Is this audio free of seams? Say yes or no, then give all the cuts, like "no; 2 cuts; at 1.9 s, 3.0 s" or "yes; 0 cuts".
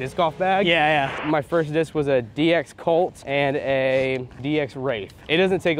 no; 3 cuts; at 1.2 s, 3.2 s, 4.5 s